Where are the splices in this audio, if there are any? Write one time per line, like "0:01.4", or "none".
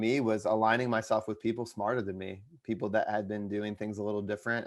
none